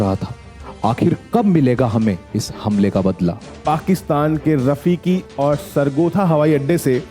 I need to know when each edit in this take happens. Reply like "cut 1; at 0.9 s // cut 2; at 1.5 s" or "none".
cut 1; at 3.6 s